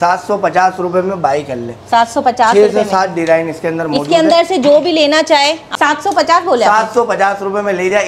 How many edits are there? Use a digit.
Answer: 1